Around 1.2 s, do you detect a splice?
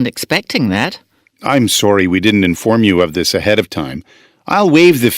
yes; 1 cut; at 1.2 s

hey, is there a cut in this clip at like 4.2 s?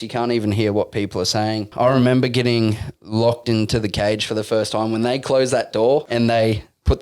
no; 2 cuts; at 1.7 s, 6.1 s

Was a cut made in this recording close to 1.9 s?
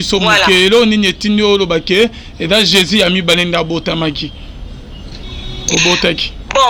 no; 0 cuts

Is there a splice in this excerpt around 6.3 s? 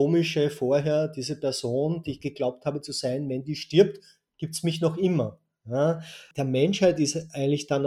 yes; 1 cut; at 6.3 s

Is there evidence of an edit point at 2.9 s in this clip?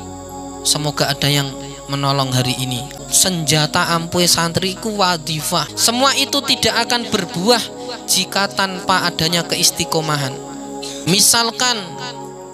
yes; 3 cuts; at 2.9 s, 5.7 s, 11.0 s

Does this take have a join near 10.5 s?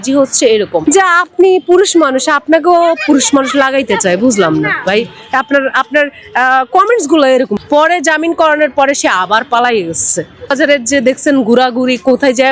yes; 3 cuts; at 0.8 s, 7.6 s, 10.5 s

